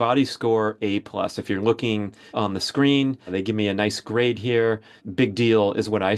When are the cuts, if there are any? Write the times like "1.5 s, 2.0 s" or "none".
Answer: 2.2 s, 3.3 s, 5.0 s